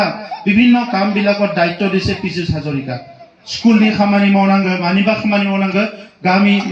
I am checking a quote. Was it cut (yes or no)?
no